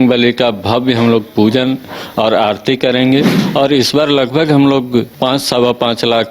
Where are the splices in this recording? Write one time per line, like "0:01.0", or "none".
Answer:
0:03.4
0:05.1